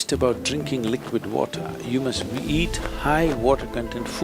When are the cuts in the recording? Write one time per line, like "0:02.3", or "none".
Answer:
none